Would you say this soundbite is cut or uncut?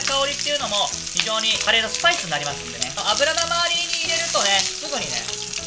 uncut